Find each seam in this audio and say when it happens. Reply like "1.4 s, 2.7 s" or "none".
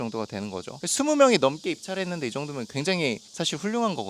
none